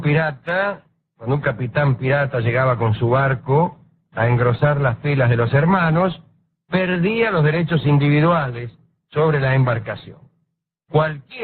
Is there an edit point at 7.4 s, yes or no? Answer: no